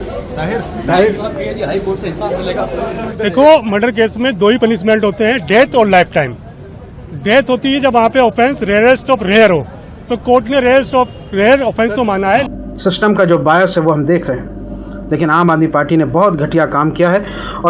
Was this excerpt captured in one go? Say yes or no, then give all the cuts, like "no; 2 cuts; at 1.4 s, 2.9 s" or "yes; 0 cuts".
no; 2 cuts; at 3.1 s, 12.5 s